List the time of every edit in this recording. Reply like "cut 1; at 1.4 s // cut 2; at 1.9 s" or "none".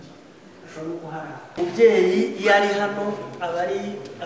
cut 1; at 1.5 s